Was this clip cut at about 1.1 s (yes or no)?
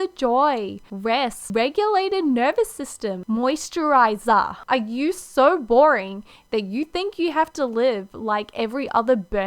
yes